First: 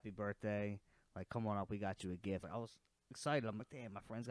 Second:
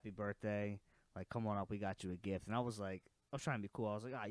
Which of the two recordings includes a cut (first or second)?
first